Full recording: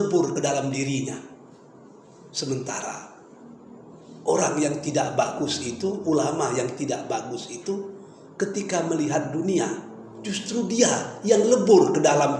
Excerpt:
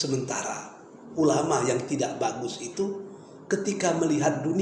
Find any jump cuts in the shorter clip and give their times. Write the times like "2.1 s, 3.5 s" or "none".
1.1 s